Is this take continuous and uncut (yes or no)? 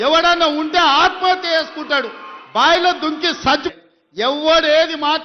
no